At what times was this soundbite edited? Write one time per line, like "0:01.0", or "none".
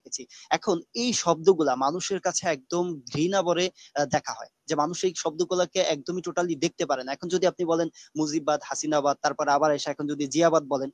none